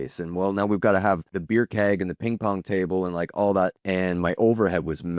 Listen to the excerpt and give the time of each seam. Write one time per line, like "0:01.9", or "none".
0:01.3
0:03.8